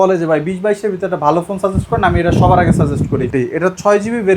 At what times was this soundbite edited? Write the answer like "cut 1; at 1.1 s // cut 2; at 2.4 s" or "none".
cut 1; at 3.3 s